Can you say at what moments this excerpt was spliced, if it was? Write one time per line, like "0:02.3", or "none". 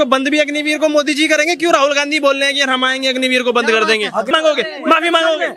0:04.3